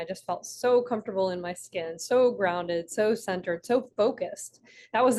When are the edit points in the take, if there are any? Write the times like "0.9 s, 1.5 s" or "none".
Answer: none